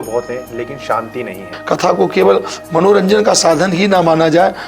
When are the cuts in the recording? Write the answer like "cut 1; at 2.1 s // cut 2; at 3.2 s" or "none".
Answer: cut 1; at 1.5 s

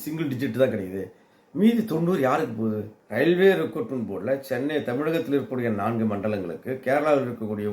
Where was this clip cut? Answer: cut 1; at 2.9 s

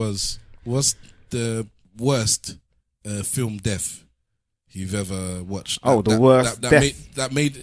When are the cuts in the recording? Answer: cut 1; at 1.8 s

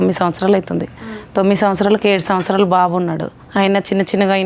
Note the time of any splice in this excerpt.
cut 1; at 3.3 s

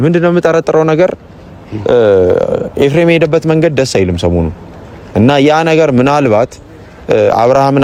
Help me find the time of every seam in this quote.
none

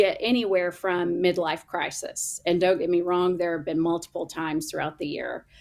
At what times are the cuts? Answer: none

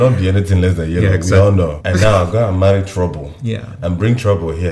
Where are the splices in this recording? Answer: cut 1; at 1.8 s

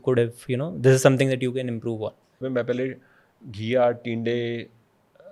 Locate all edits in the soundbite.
cut 1; at 2.4 s

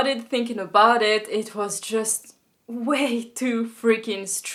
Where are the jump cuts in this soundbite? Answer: none

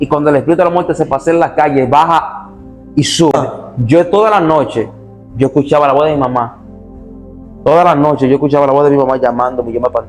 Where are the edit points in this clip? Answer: cut 1; at 3.3 s

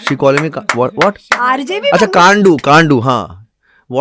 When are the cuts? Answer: none

